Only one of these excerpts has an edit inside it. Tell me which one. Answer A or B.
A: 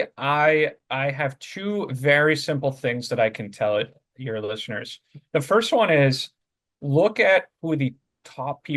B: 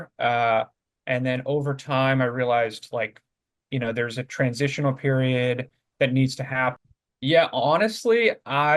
B